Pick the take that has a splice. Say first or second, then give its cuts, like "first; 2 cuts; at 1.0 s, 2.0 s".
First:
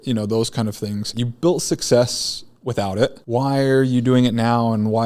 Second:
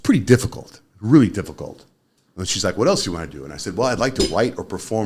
first; 2 cuts; at 1.2 s, 3.2 s